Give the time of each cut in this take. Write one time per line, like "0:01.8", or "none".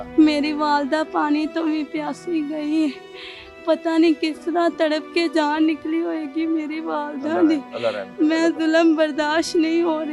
none